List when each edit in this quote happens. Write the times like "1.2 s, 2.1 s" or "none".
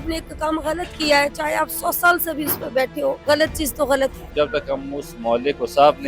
3.2 s, 4.3 s